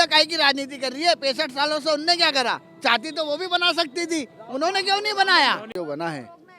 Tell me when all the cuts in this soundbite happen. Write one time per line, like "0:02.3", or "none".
0:05.7